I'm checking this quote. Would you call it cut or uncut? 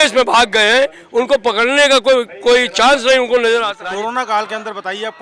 cut